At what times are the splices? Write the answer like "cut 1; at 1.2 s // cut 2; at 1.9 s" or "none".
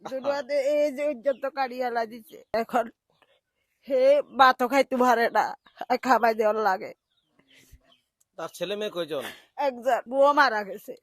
cut 1; at 2.5 s // cut 2; at 10.1 s

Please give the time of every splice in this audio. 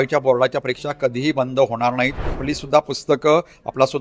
cut 1; at 2.4 s

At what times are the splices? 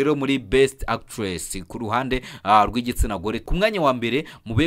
cut 1; at 3.4 s

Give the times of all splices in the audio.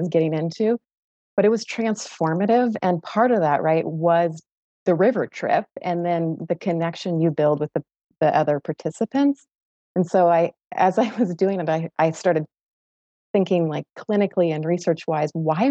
none

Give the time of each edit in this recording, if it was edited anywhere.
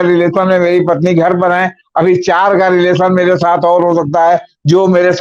none

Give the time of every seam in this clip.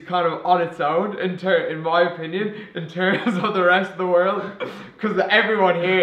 none

